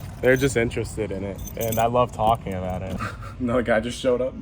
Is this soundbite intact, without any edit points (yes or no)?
no